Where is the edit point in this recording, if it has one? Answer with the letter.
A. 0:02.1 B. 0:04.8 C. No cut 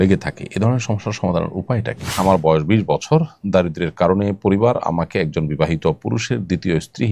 A